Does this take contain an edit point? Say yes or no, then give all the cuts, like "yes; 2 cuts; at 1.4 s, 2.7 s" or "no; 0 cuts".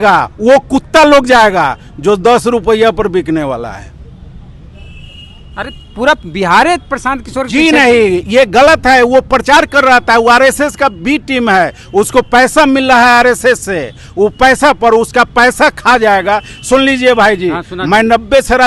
no; 0 cuts